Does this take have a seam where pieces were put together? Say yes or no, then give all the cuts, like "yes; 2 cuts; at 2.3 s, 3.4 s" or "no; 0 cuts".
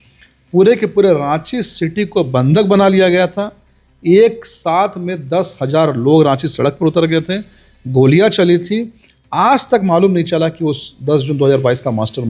no; 0 cuts